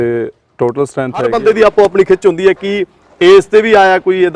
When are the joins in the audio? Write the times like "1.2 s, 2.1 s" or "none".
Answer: 1.3 s